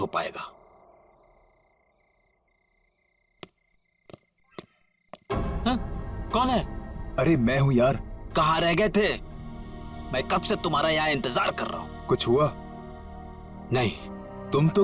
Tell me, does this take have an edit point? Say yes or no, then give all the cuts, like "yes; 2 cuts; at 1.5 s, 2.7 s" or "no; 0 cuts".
no; 0 cuts